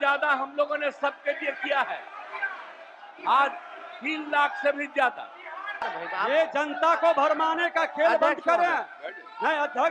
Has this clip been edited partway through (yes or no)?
yes